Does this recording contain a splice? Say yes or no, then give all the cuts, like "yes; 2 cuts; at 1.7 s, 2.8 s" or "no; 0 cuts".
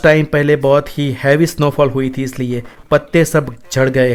no; 0 cuts